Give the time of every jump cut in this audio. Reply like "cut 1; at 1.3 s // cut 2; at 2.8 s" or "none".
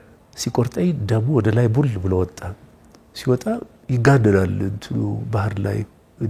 none